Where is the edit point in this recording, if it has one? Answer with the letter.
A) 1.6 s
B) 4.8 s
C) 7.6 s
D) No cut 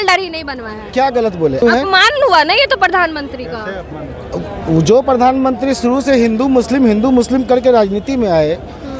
A